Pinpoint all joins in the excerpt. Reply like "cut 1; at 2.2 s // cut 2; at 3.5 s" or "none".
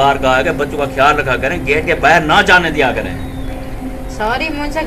none